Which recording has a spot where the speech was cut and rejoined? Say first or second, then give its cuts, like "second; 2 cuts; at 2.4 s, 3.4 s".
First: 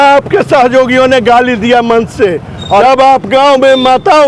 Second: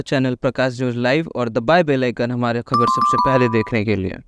first; 1 cut; at 2.8 s